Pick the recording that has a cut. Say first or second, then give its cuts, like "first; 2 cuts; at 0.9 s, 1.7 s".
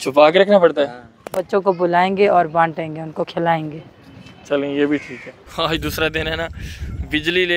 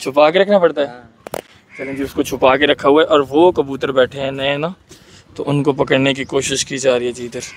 first; 2 cuts; at 1.4 s, 5.5 s